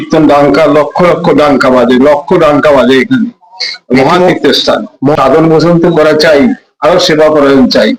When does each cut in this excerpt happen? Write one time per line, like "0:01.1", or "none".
none